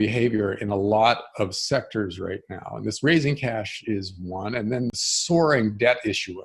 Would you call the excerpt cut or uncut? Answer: cut